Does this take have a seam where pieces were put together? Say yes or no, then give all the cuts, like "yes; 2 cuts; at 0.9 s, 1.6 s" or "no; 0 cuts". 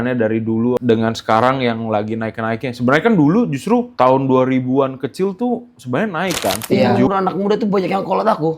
yes; 1 cut; at 7.1 s